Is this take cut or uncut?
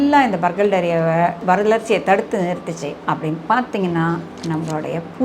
cut